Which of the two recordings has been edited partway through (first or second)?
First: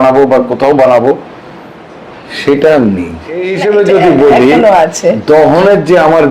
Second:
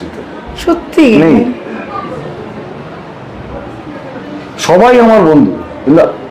first